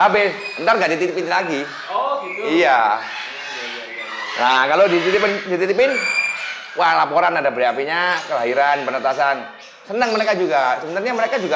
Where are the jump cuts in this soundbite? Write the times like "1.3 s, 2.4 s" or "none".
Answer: none